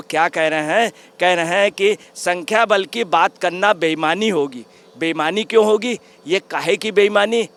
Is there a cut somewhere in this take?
no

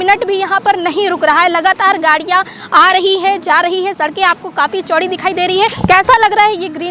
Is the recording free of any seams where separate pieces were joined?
no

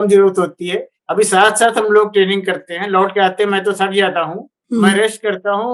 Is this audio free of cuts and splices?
yes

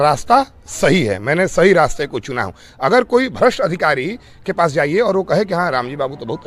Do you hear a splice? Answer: no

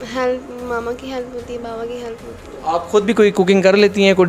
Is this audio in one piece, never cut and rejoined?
yes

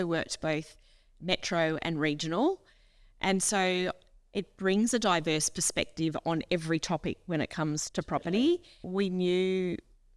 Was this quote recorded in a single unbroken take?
no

